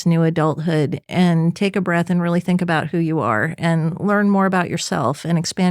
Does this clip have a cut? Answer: yes; 1 cut; at 1.0 s

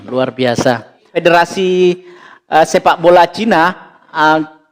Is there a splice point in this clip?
yes; 1 cut; at 1.0 s

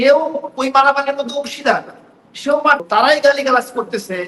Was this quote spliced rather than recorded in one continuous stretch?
yes; 1 cut; at 2.8 s

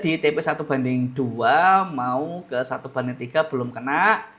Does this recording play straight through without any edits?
yes; 0 cuts

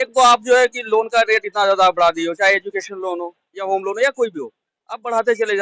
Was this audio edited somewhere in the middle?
no; 0 cuts

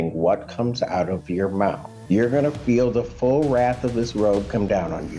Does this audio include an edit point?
yes; 1 cut; at 1.9 s

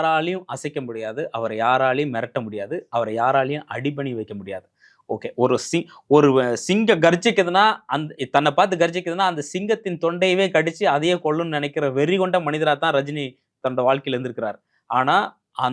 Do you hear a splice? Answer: no; 0 cuts

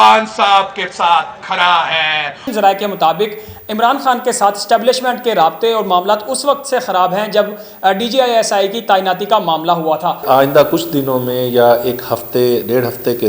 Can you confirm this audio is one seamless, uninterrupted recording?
no; 2 cuts; at 2.5 s, 10.2 s

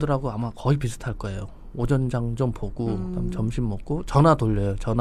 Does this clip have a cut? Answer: no; 0 cuts

